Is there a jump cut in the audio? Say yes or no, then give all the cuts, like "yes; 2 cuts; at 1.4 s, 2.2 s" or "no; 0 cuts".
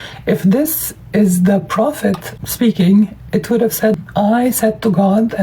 yes; 2 cuts; at 2.3 s, 4.1 s